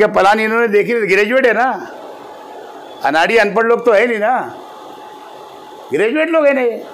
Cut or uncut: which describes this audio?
uncut